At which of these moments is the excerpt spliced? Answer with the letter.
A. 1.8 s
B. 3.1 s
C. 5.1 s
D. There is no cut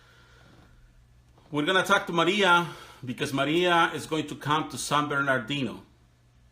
B